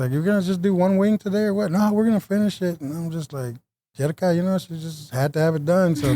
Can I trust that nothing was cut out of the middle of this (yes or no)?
yes